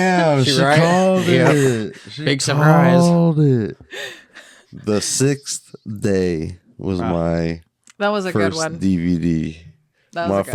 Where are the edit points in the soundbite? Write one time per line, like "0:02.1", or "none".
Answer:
none